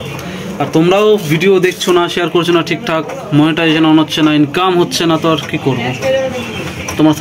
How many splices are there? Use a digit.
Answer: 0